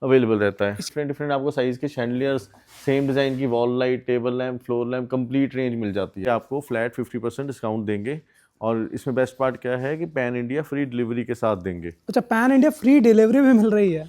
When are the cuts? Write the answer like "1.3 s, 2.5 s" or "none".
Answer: 0.9 s, 6.2 s